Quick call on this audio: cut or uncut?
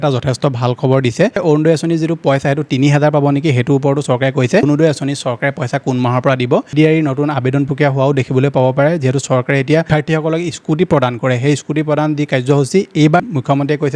cut